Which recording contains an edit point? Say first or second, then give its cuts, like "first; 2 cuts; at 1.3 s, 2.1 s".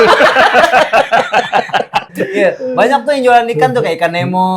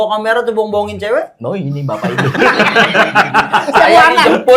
first; 1 cut; at 2.2 s